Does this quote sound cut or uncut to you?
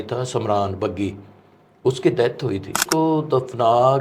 cut